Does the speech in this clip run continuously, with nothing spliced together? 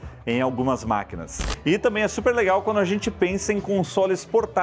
no; 1 cut; at 1.4 s

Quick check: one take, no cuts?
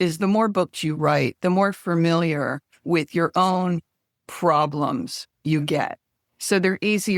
yes; 0 cuts

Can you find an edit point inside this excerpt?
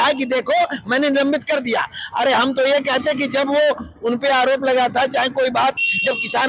no; 0 cuts

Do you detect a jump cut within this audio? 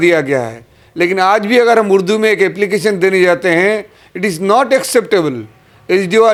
no; 0 cuts

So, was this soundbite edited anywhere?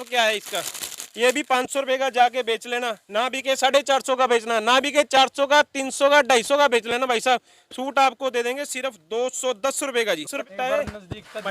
no; 0 cuts

